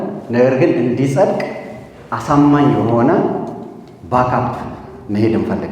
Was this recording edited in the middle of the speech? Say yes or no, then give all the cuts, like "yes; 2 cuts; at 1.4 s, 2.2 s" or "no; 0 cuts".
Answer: no; 0 cuts